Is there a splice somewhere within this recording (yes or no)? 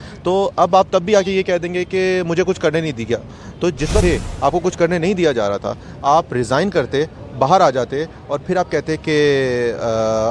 yes